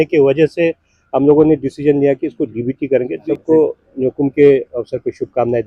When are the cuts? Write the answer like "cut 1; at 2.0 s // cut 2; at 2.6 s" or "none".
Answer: cut 1; at 3.2 s